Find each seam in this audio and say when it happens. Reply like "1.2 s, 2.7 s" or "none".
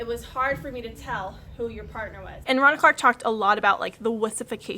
2.4 s